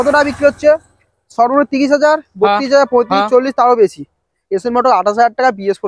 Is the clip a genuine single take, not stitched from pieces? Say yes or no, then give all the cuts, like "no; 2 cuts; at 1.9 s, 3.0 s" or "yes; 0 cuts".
yes; 0 cuts